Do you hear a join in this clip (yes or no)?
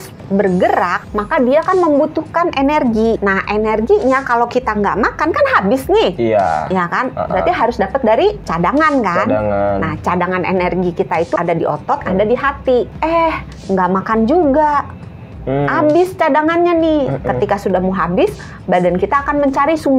yes